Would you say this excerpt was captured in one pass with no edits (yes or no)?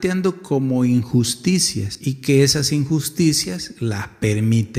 yes